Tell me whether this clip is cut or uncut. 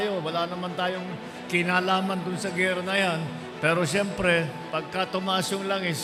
uncut